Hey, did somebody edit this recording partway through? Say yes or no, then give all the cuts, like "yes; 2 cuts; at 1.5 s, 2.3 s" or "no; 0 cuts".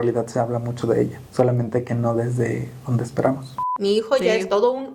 yes; 2 cuts; at 1.2 s, 3.7 s